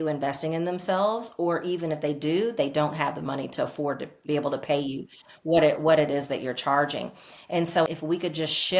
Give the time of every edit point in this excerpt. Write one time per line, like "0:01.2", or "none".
0:04.2
0:07.8